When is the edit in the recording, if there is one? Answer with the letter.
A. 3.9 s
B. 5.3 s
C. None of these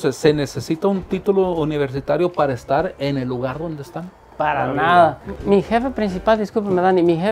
B